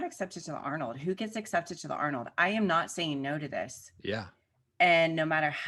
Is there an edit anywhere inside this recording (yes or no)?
no